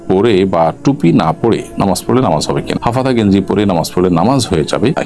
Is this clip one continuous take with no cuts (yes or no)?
yes